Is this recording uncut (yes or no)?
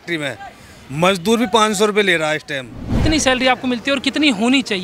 no